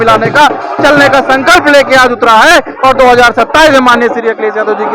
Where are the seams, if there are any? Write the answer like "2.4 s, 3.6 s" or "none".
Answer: none